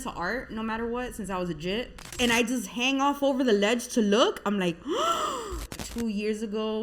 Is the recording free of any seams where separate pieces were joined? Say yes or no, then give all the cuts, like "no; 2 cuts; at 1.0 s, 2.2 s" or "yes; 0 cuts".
no; 2 cuts; at 2.1 s, 5.7 s